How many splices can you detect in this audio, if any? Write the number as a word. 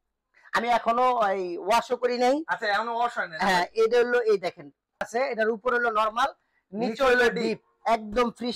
one